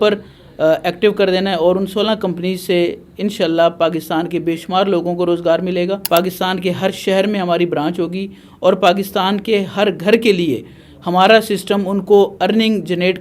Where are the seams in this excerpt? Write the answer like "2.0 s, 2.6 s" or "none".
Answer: 6.0 s